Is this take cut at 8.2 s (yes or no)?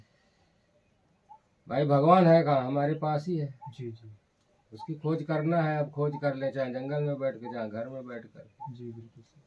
no